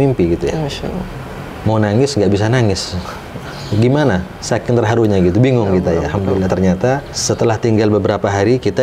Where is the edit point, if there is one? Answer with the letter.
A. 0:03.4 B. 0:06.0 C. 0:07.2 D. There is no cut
C